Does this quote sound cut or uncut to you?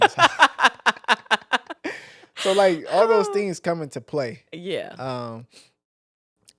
uncut